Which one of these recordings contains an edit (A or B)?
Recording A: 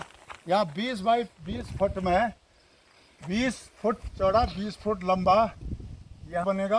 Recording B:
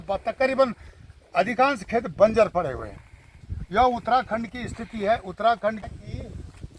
B